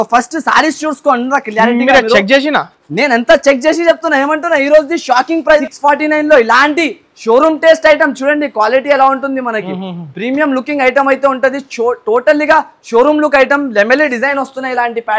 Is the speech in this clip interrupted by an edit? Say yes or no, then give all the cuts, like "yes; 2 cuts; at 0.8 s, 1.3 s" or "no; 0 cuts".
yes; 1 cut; at 5.6 s